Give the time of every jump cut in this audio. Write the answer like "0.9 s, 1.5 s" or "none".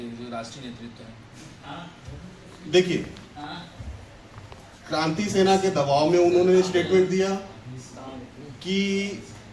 none